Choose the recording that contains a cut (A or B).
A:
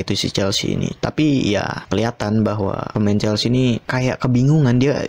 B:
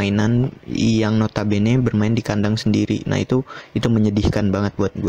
A